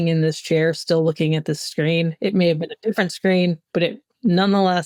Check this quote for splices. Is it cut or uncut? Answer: uncut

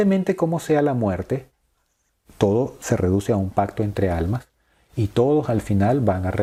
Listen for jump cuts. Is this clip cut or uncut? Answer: uncut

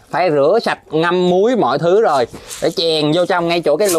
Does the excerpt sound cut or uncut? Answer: uncut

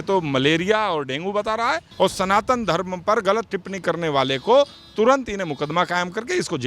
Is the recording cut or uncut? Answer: cut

